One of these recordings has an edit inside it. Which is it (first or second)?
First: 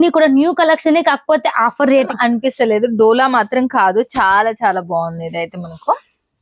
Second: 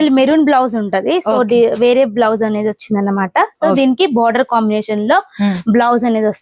first